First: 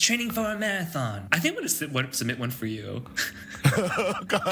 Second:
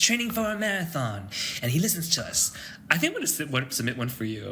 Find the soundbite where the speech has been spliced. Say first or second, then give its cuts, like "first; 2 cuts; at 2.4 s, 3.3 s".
first; 1 cut; at 1.2 s